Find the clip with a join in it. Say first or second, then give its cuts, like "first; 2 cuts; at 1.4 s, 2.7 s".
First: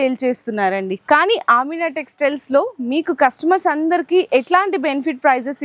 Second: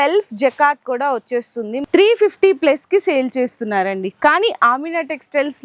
second; 1 cut; at 1.8 s